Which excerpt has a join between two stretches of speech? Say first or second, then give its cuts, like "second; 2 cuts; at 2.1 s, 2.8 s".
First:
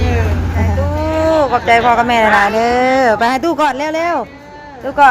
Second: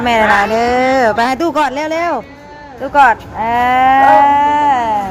first; 1 cut; at 1.0 s